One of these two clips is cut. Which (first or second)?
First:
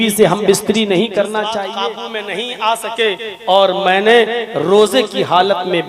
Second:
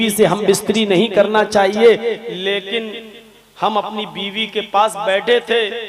first